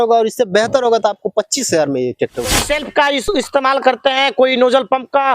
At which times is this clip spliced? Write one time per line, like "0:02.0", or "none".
0:02.6